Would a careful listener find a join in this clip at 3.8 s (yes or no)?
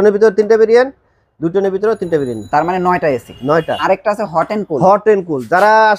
yes